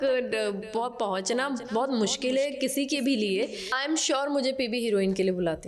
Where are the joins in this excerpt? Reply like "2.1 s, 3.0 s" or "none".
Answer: 3.7 s